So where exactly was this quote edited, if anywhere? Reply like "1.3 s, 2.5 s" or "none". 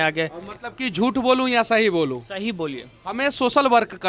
none

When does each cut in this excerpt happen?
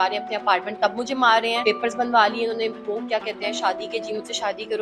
1.6 s

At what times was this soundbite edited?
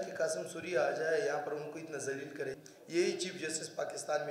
2.6 s

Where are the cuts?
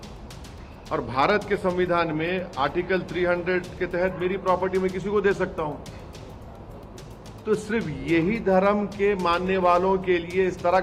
none

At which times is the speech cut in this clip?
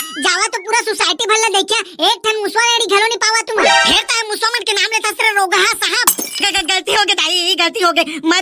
3.6 s

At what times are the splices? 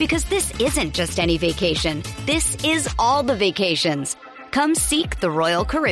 none

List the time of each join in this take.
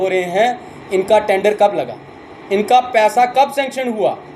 none

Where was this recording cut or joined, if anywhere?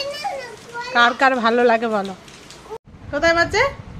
2.6 s

